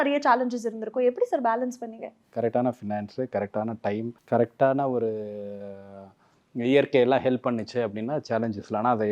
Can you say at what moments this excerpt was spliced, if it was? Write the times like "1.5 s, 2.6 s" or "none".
2.2 s, 4.2 s